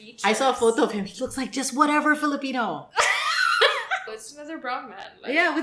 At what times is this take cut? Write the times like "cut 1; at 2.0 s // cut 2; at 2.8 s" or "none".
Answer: cut 1; at 4.1 s